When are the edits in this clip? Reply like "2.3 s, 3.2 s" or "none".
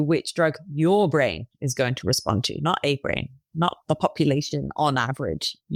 none

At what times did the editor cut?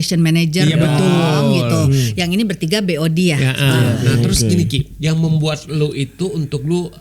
4.0 s

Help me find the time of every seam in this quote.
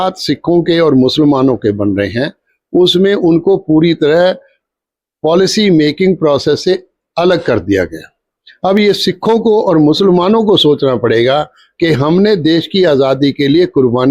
none

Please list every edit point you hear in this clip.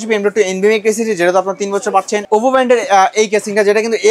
2.2 s

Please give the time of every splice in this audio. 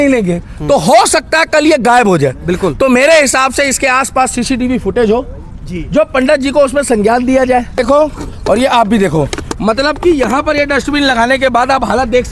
7.8 s

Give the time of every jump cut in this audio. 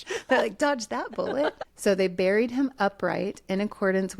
1.6 s

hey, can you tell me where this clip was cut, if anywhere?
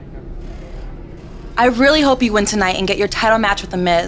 1.3 s

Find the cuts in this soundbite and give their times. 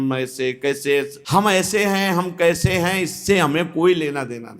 1.2 s

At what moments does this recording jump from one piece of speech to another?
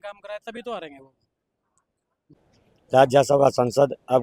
2.4 s

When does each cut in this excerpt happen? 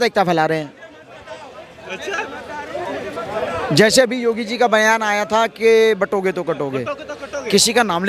none

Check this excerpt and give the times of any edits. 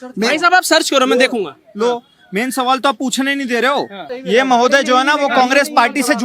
4.2 s

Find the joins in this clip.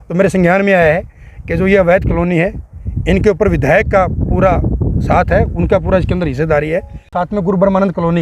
7.2 s

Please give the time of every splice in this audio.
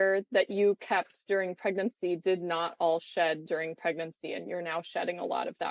none

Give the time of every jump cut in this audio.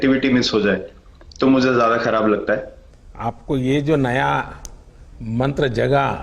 3.0 s

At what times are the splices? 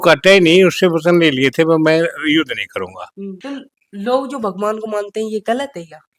3.3 s

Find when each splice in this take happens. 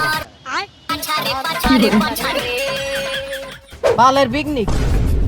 3.8 s

